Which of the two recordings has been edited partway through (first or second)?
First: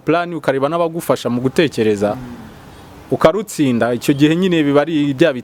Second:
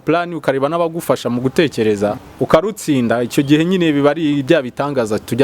second